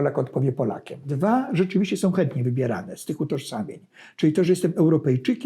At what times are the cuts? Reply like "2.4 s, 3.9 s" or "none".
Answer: 1.1 s